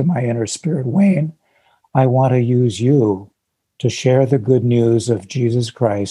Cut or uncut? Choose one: uncut